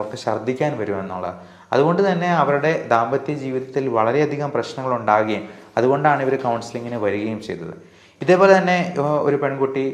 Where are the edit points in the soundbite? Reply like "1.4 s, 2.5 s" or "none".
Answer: none

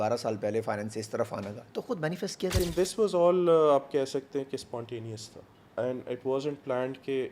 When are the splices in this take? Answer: 2.6 s

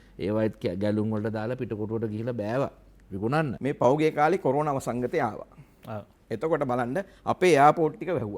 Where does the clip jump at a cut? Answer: 3.5 s

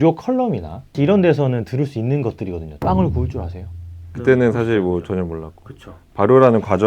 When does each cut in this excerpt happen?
2.7 s, 4.0 s

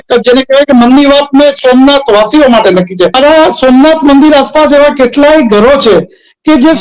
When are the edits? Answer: 3.1 s

